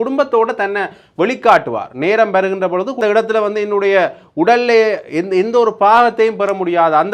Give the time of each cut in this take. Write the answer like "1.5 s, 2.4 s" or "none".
3.0 s